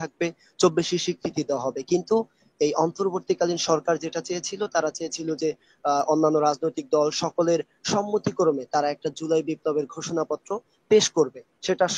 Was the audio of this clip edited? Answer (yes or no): no